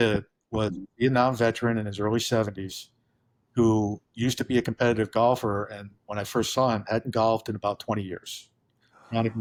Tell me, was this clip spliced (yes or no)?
no